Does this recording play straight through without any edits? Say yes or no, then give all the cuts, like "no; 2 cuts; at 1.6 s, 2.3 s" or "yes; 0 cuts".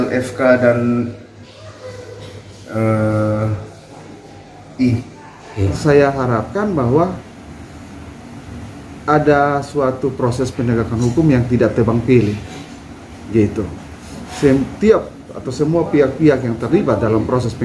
no; 1 cut; at 5.8 s